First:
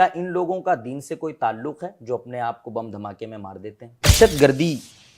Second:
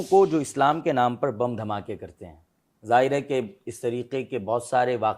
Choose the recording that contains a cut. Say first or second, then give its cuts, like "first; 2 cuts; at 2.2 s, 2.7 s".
first; 1 cut; at 4.1 s